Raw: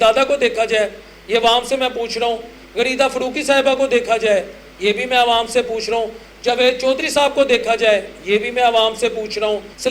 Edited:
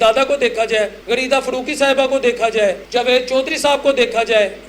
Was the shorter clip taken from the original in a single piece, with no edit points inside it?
no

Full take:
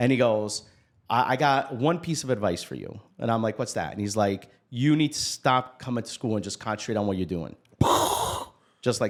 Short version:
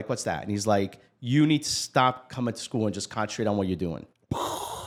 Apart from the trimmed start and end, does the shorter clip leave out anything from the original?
no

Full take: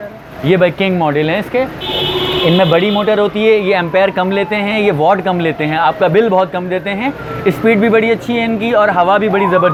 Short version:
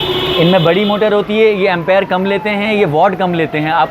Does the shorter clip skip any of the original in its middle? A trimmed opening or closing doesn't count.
no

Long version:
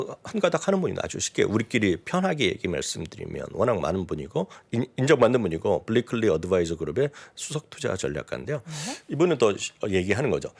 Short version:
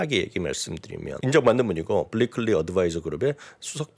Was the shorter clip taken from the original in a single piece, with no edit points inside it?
no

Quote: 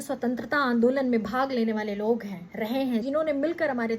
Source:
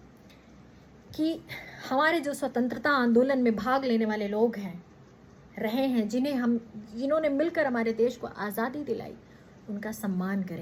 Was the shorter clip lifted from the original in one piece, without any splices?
no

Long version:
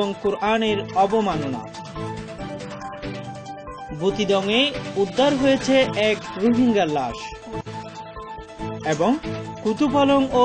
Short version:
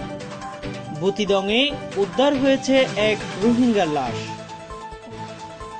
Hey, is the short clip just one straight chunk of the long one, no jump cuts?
no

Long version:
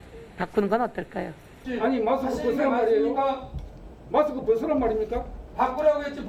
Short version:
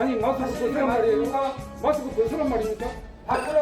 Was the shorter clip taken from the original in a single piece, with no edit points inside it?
no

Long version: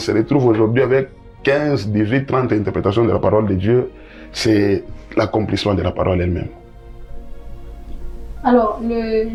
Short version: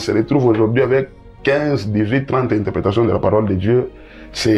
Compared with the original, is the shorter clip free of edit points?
yes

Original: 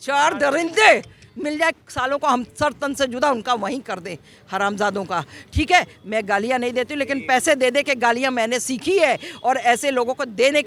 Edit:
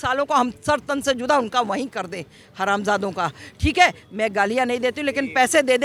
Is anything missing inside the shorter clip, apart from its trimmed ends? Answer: no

